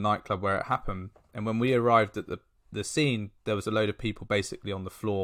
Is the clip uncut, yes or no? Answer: yes